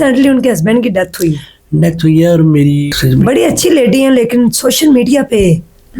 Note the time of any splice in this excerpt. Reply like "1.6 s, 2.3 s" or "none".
3.0 s